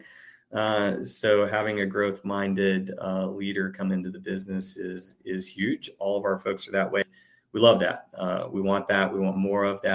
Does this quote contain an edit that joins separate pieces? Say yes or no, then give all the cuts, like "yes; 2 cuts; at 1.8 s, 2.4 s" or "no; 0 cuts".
yes; 1 cut; at 7.0 s